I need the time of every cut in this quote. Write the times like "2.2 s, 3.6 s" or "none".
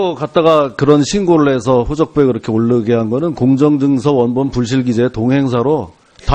3.6 s